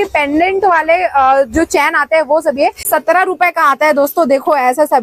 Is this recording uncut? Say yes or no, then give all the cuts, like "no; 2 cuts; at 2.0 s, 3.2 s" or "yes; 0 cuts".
no; 1 cut; at 2.8 s